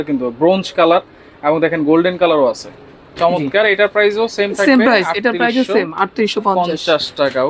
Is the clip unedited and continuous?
yes; 0 cuts

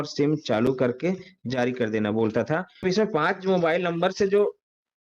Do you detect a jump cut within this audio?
yes; 1 cut; at 2.8 s

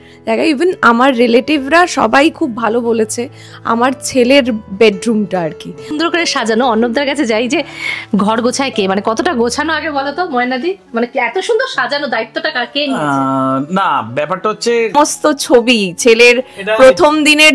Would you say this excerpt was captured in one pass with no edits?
no; 2 cuts; at 6.0 s, 14.9 s

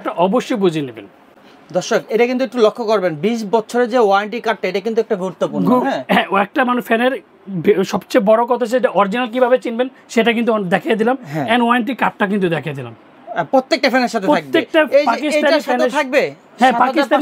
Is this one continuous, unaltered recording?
yes; 0 cuts

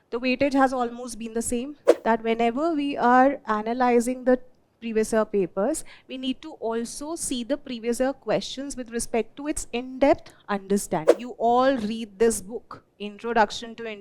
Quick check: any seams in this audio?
yes; 2 cuts; at 1.9 s, 11.1 s

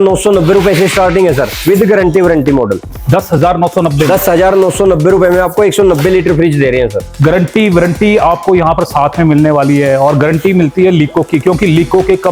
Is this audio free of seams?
yes; 0 cuts

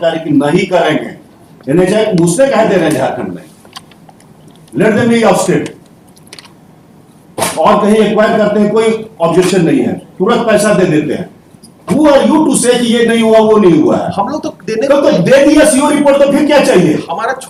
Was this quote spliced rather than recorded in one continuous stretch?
no; 0 cuts

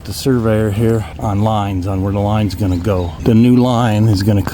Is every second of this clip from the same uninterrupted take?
no; 2 cuts; at 1.1 s, 3.1 s

